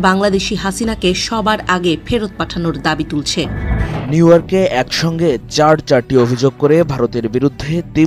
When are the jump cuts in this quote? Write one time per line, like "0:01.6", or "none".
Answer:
0:04.0